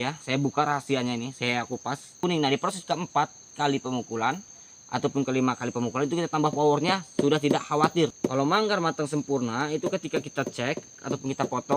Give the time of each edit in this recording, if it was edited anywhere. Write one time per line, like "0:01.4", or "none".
0:02.2
0:08.1